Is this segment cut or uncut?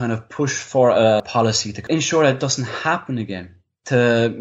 cut